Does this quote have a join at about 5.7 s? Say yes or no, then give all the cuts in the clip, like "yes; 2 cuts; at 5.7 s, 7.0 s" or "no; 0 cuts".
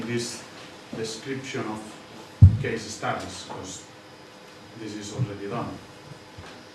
yes; 1 cut; at 5.7 s